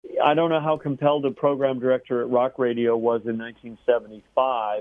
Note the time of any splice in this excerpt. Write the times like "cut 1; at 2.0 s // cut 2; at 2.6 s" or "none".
none